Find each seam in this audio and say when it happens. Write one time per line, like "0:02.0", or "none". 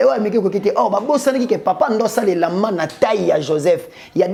none